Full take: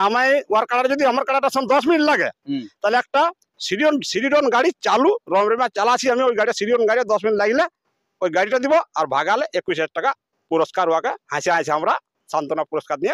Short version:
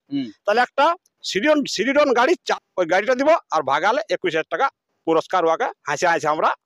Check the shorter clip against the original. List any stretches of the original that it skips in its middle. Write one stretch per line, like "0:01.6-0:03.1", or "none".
0:04.8-0:07.9